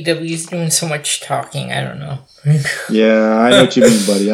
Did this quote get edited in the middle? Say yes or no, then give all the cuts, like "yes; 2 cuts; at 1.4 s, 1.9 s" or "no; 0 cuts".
no; 0 cuts